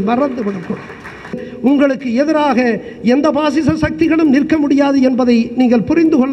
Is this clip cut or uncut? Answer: cut